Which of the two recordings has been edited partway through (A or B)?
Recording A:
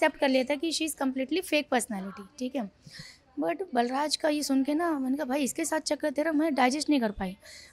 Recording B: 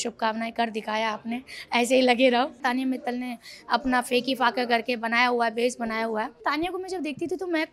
B